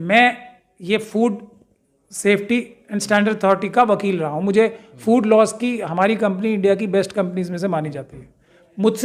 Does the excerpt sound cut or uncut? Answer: uncut